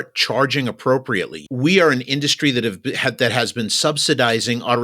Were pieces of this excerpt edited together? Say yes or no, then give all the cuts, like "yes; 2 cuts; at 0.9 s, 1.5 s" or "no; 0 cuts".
yes; 1 cut; at 1.4 s